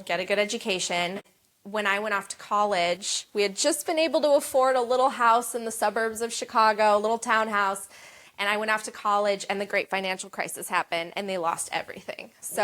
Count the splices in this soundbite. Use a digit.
1